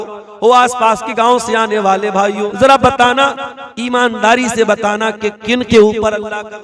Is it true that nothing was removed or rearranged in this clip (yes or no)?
no